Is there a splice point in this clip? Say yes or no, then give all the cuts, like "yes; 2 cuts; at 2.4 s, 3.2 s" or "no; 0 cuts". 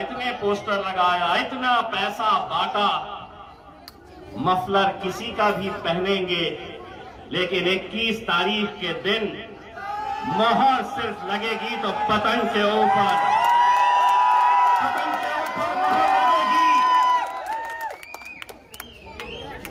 no; 0 cuts